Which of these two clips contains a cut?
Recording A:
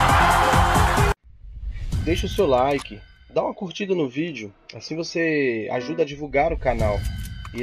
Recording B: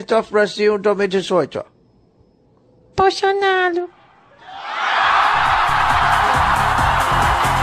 A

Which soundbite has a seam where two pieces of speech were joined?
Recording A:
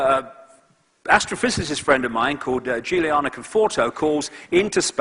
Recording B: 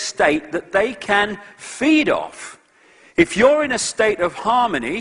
A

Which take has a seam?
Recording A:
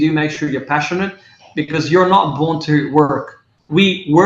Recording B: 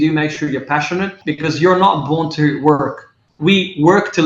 B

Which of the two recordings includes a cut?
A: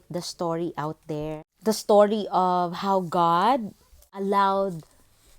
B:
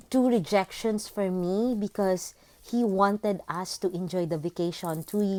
A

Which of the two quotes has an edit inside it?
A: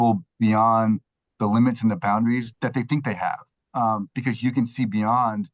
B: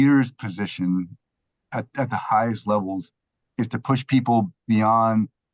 A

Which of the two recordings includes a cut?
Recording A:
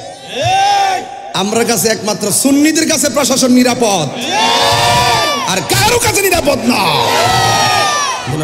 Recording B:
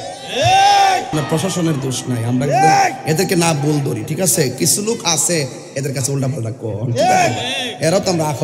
B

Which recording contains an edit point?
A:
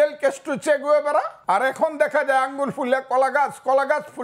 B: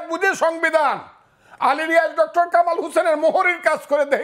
A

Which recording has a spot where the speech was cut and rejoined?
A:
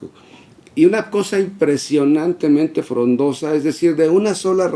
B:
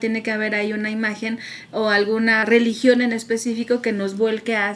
B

